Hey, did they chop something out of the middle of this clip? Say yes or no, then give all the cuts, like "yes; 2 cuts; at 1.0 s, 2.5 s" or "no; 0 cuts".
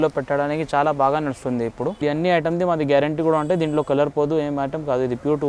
yes; 1 cut; at 2.0 s